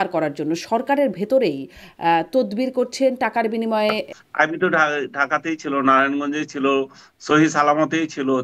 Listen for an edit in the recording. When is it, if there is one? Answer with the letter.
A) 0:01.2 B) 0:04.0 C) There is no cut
B